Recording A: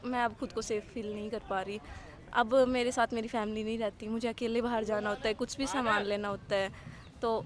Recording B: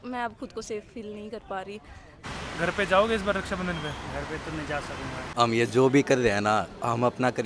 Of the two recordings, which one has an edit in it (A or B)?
B